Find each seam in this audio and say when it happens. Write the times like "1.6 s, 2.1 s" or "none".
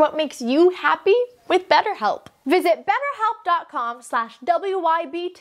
2.3 s